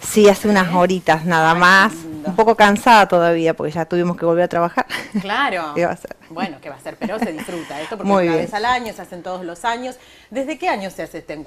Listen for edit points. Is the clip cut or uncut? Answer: uncut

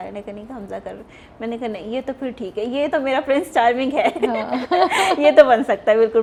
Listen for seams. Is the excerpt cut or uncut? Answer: uncut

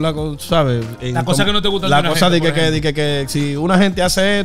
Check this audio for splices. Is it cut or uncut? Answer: uncut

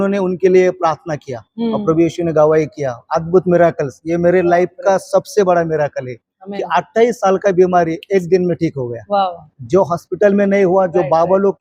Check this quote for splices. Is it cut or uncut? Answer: uncut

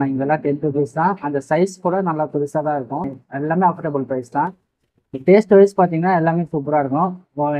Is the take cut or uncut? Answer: uncut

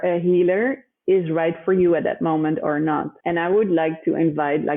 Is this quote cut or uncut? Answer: cut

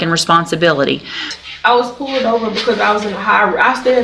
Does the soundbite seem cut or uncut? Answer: cut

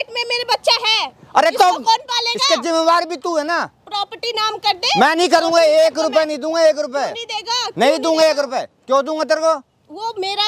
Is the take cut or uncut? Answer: uncut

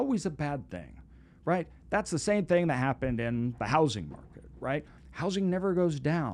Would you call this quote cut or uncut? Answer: uncut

